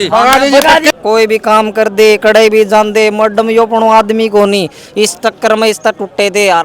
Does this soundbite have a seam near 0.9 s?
yes; 1 cut; at 0.9 s

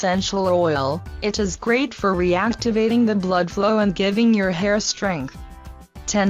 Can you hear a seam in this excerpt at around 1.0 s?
yes; 1 cut; at 1.0 s

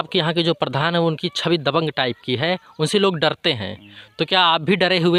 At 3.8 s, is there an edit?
no; 0 cuts

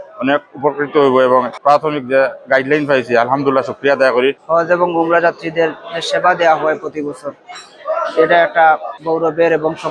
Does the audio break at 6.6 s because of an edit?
no; 3 cuts; at 1.5 s, 4.4 s, 8.9 s

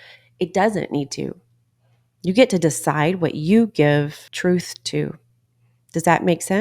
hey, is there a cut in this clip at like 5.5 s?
no; 1 cut; at 4.2 s

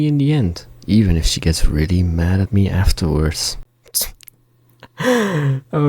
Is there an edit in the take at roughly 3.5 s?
yes; 1 cut; at 3.5 s

